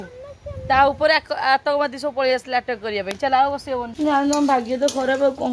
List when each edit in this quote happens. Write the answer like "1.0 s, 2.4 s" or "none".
3.9 s